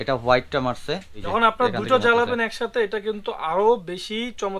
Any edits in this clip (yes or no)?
yes